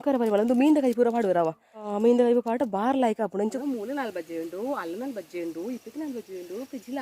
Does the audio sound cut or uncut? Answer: cut